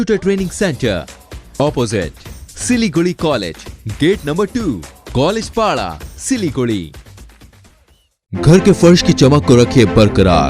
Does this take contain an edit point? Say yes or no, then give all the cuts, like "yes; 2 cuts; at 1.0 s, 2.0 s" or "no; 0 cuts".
no; 0 cuts